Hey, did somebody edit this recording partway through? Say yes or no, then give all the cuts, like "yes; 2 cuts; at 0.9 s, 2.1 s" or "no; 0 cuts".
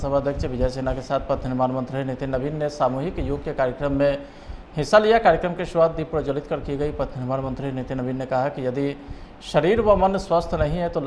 no; 0 cuts